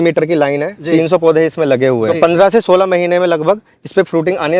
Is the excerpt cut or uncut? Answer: cut